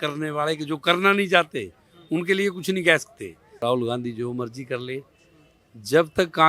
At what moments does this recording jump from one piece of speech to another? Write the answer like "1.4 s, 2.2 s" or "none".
3.6 s